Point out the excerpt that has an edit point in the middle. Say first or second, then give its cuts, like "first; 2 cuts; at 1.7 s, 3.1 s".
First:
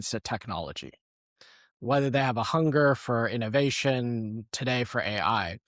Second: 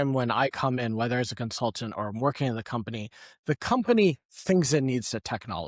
first; 1 cut; at 1.7 s